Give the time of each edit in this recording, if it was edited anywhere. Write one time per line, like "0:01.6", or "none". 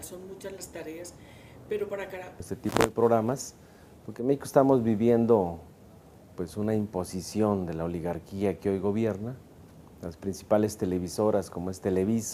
none